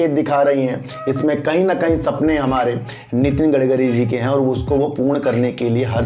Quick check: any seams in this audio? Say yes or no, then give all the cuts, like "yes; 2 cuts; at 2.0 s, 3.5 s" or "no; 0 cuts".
no; 0 cuts